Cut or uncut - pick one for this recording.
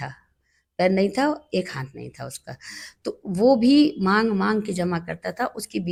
uncut